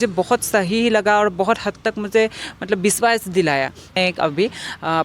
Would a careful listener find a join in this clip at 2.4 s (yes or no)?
no